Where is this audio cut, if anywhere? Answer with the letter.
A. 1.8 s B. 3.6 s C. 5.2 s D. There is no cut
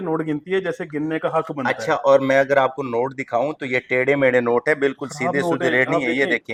D